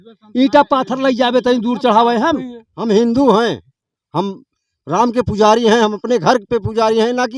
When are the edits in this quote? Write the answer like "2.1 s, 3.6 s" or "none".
2.6 s